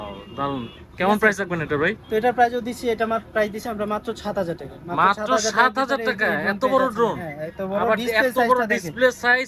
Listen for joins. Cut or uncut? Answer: uncut